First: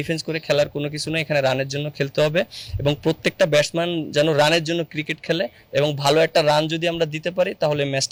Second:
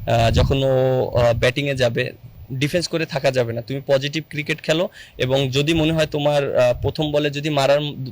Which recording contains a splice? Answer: second; 1 cut; at 2.3 s

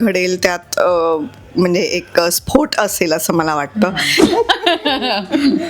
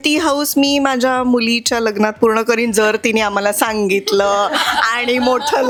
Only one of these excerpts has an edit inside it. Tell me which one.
first; 1 cut; at 4.3 s

